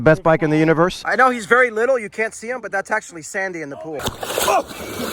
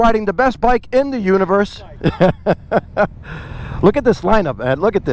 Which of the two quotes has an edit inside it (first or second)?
first